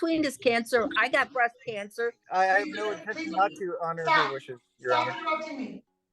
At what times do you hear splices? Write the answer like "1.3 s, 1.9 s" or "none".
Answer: 2.2 s